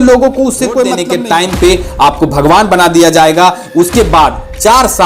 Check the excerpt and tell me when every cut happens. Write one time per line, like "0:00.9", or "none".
0:01.0